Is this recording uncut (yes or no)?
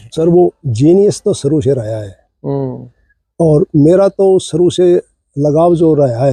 yes